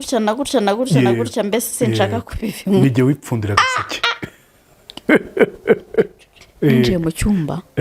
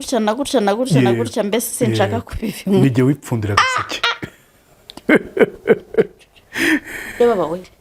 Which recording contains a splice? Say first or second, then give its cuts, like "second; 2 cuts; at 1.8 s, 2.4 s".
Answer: first; 1 cut; at 6.4 s